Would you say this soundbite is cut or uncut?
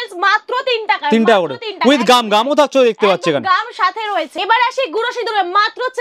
uncut